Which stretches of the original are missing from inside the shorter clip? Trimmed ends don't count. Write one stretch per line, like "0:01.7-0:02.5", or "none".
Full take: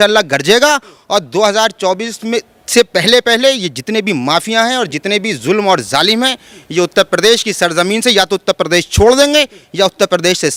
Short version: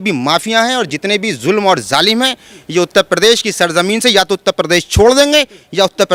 none